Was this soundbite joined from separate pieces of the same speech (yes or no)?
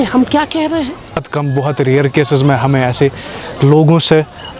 yes